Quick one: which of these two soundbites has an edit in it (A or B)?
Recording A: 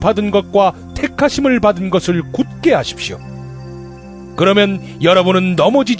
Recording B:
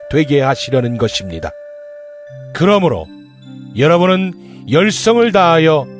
B